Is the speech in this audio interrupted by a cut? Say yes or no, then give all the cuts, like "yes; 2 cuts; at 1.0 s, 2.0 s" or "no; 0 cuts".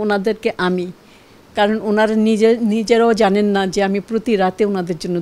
no; 0 cuts